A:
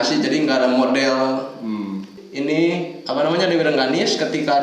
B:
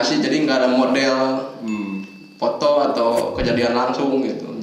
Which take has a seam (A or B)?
A